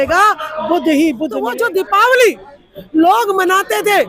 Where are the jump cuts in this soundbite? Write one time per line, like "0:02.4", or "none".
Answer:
0:01.4